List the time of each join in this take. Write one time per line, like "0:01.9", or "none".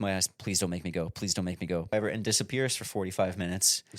0:01.9